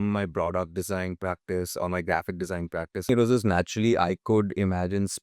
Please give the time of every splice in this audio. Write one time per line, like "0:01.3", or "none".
0:03.1